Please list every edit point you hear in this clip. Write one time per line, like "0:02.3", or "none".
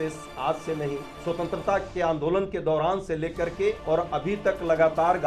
0:01.1
0:03.8